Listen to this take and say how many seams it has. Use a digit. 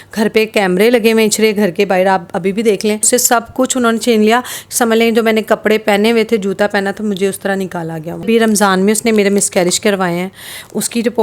2